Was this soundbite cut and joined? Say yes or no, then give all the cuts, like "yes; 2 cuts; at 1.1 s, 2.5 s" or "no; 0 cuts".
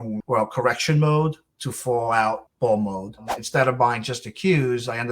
yes; 1 cut; at 3.4 s